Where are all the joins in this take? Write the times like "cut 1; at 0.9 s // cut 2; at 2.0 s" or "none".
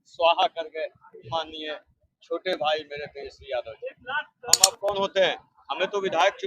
cut 1; at 4.6 s